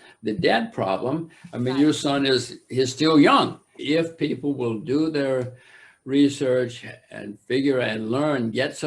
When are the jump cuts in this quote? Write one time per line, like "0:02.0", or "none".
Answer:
0:03.8